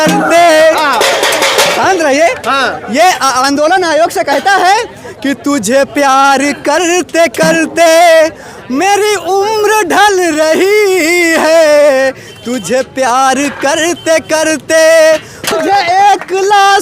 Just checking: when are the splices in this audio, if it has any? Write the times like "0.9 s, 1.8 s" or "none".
15.5 s